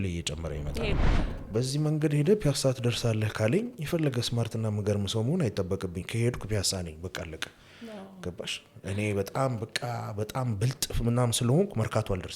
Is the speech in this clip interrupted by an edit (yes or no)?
yes